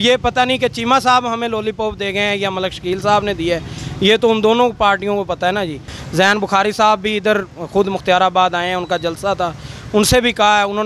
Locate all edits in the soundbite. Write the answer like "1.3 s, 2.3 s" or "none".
5.9 s

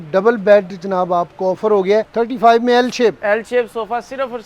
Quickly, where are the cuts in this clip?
2.1 s

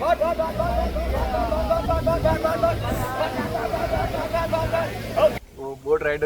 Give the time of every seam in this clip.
5.3 s

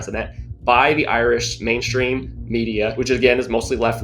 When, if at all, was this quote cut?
3.0 s

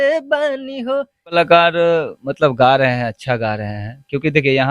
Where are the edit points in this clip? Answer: 1.3 s

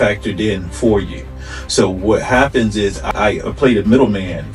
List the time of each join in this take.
3.1 s

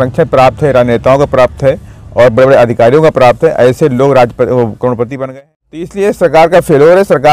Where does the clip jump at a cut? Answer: 5.2 s

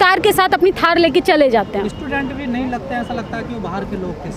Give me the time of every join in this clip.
none

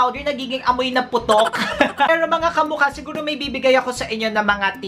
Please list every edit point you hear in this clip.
2.1 s

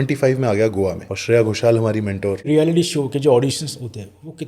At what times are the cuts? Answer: 1.1 s, 2.5 s

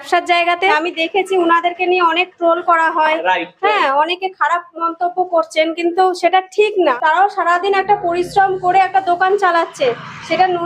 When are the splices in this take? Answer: 0.8 s, 7.0 s

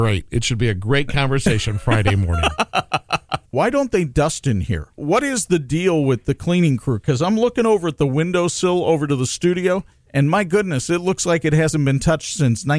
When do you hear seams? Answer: 3.5 s, 5.0 s, 10.0 s

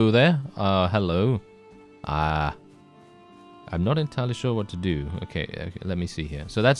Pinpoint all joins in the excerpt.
none

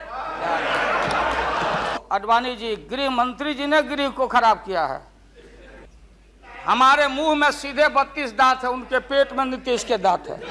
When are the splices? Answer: 2.0 s, 5.9 s

